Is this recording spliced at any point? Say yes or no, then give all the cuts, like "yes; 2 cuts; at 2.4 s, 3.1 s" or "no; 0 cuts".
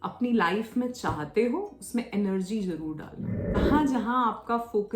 yes; 1 cut; at 3.6 s